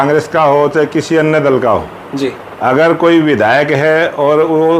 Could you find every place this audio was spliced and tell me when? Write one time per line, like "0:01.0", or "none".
none